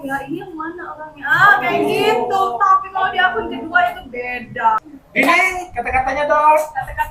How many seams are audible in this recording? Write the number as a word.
one